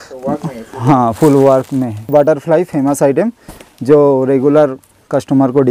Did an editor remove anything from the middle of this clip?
yes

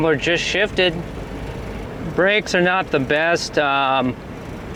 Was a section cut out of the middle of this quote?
no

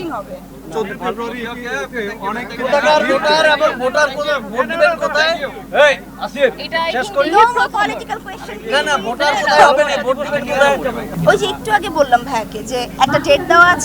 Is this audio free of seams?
no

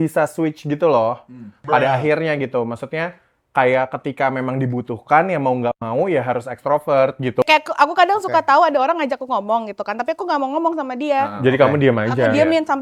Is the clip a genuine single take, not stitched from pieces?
no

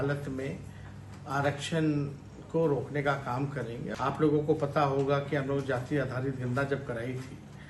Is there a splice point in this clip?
yes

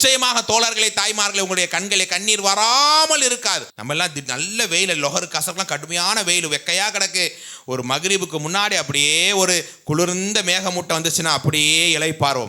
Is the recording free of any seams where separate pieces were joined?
no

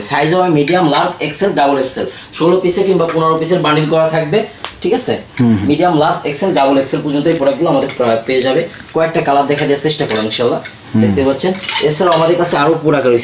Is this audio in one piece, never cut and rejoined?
yes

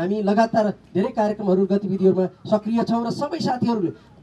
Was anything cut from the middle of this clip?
no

